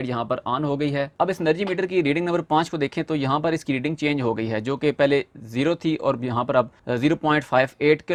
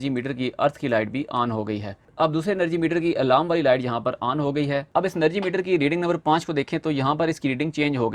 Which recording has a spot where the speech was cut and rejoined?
second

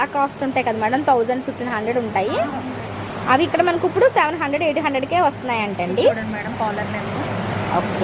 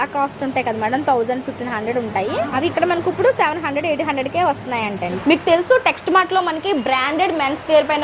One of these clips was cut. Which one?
second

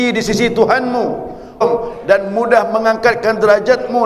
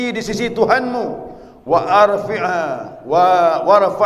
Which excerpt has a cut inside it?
first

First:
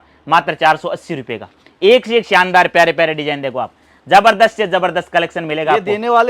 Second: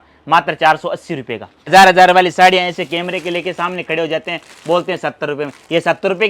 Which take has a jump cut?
second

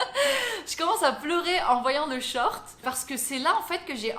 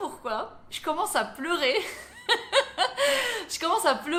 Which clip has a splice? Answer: first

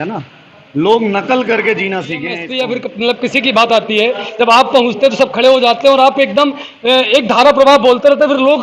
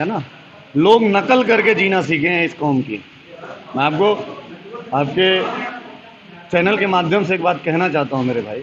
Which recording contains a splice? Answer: first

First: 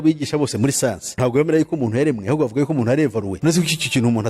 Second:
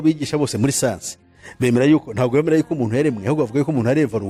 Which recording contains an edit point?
first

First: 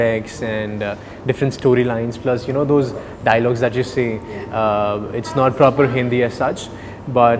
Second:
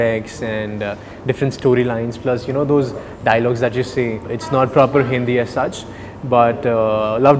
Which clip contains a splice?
second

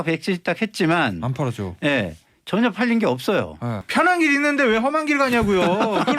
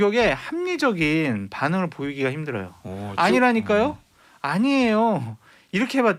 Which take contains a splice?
first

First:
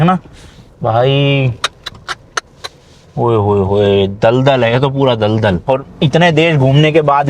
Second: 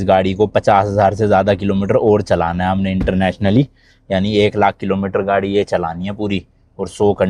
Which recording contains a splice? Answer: first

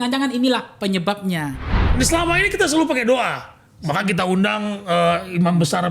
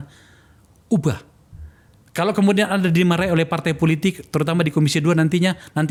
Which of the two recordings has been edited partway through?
first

